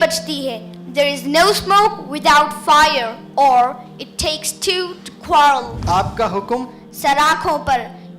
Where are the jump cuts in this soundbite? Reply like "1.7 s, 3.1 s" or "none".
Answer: 5.7 s